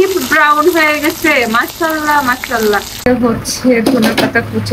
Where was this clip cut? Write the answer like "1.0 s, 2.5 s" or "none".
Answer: 3.1 s